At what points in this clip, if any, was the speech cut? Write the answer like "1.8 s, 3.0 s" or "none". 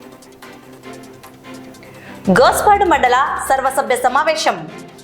1.4 s